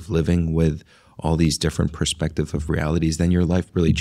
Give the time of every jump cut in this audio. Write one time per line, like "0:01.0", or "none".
none